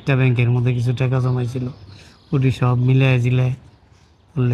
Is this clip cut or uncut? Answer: uncut